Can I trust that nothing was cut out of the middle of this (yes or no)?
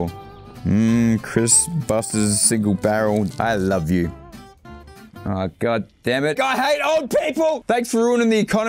no